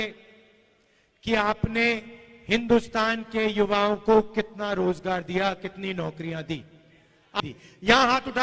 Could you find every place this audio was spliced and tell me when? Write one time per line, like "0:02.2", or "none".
0:07.4